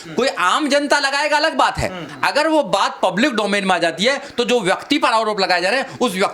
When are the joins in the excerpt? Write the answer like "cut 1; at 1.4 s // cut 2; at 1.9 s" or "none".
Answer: cut 1; at 2.1 s